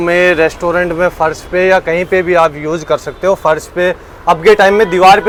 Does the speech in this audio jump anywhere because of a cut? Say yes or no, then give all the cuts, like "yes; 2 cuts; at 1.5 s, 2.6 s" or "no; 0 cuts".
no; 0 cuts